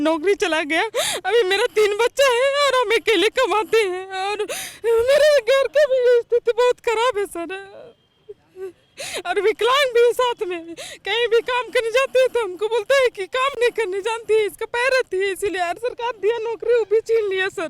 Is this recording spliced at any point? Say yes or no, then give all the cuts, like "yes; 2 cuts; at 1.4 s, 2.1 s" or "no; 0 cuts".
no; 0 cuts